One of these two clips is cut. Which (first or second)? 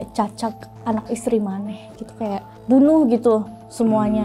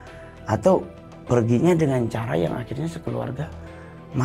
first